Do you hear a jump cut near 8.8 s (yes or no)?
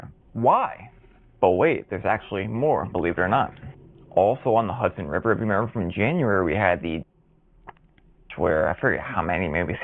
yes